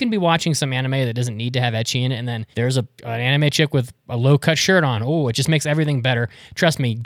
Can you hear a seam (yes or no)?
yes